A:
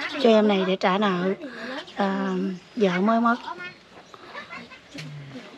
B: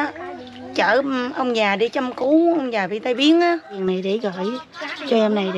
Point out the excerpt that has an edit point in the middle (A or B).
B